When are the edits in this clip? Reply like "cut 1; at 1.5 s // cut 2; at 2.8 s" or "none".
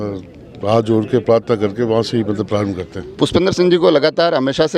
none

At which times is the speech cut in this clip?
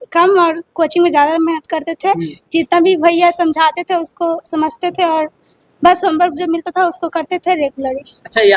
none

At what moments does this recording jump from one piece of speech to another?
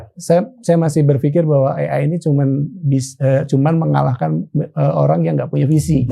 none

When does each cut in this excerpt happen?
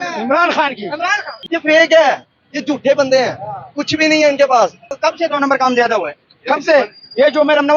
cut 1; at 1.4 s // cut 2; at 4.9 s

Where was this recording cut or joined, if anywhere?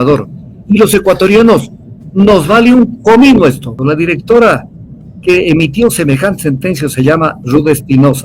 cut 1; at 3.7 s

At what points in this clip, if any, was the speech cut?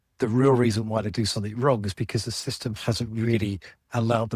none

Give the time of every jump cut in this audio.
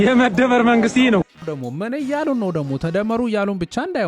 cut 1; at 1.4 s

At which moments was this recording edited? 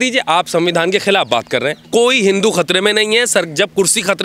cut 1; at 1.8 s

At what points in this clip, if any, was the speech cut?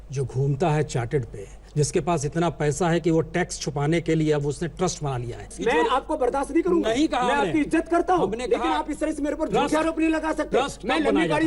cut 1; at 1.6 s // cut 2; at 5.5 s

